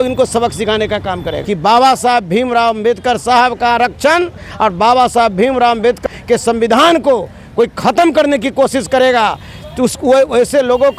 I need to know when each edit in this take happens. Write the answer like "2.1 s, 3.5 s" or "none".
1.3 s, 6.0 s